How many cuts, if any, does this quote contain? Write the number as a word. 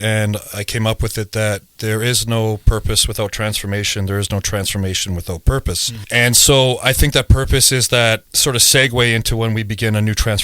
one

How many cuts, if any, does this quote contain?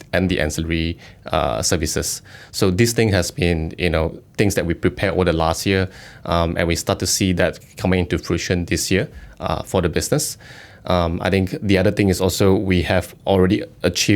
zero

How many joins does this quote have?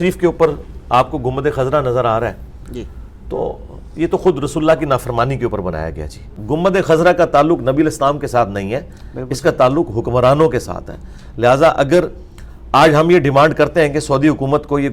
one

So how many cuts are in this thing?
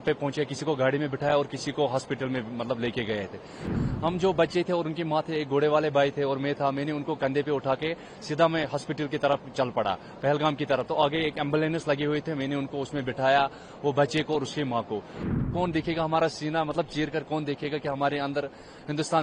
two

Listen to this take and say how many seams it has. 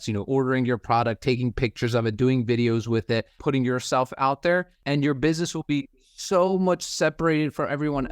two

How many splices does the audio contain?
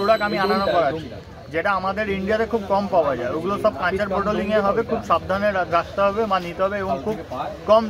zero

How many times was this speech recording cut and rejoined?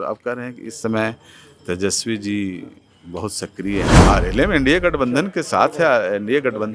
one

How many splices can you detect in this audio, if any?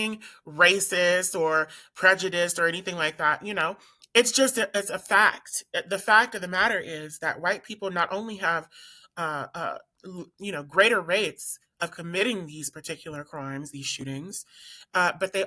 zero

